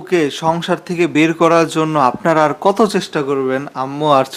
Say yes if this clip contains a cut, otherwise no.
no